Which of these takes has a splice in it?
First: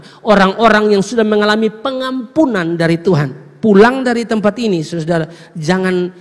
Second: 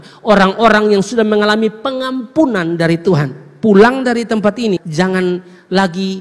second; 1 cut; at 4.8 s

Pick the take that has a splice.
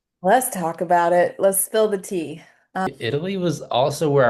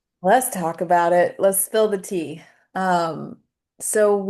first; 1 cut; at 2.9 s

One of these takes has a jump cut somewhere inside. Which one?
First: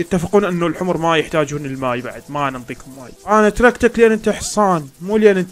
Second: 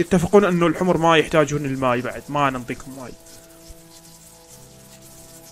first; 1 cut; at 3.1 s

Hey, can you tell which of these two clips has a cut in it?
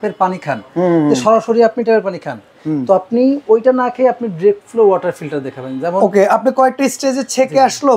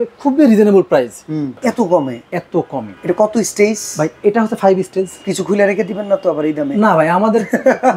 second; 2 cuts; at 1.5 s, 2.9 s

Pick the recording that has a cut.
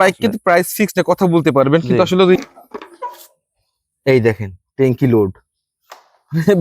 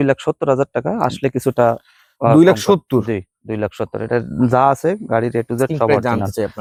first; 1 cut; at 2.4 s

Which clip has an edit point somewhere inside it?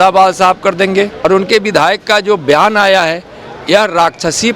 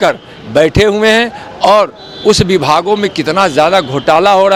first; 1 cut; at 1.2 s

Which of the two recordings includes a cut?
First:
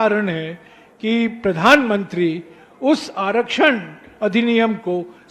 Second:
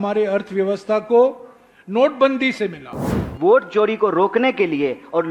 second; 1 cut; at 3.2 s

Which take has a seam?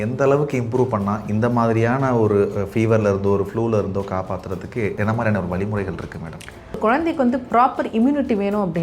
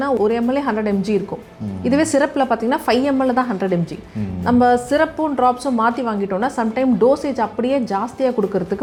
first; 2 cuts; at 4.9 s, 6.8 s

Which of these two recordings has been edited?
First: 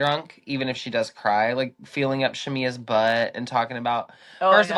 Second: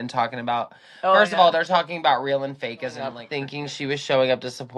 second; 1 cut; at 3.3 s

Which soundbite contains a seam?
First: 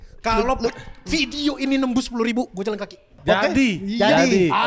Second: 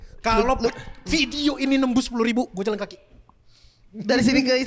first; 1 cut; at 3.2 s

